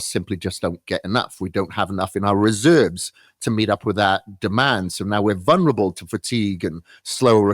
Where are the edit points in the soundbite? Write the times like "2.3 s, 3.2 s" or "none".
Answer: none

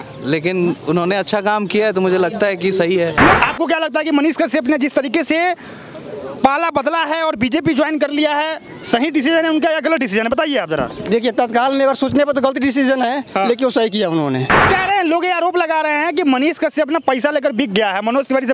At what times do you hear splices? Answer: 3.4 s, 14.7 s

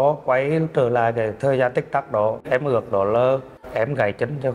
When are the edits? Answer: 2.4 s, 3.6 s

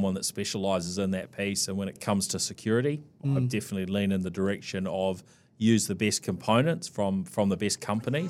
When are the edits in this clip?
2.0 s, 3.1 s

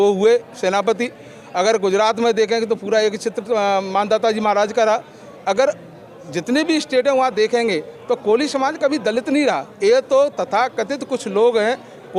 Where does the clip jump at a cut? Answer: none

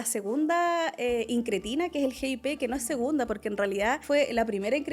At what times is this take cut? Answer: 4.0 s

